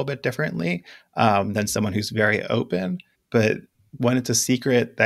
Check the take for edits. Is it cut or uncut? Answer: cut